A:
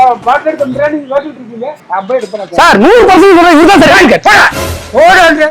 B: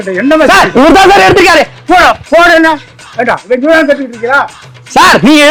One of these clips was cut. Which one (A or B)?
A